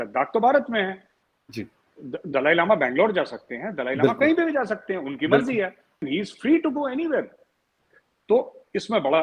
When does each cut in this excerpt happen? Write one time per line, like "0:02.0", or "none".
0:06.0